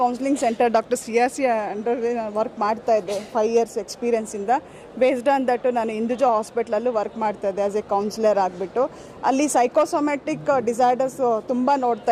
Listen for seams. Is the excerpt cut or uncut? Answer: uncut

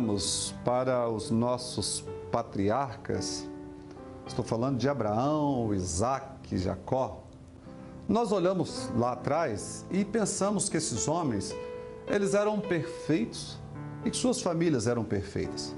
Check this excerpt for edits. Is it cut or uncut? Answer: uncut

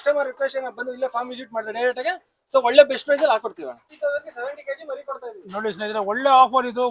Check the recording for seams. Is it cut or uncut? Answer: cut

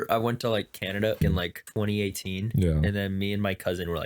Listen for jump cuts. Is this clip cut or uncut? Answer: cut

